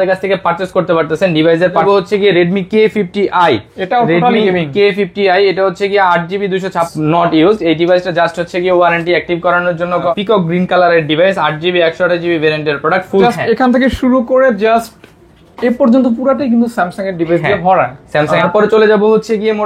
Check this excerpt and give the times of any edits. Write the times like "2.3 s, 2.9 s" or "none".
1.8 s, 6.9 s, 10.1 s, 13.2 s, 18.4 s